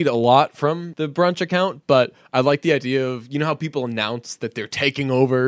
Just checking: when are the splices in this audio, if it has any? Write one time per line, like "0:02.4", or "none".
0:00.9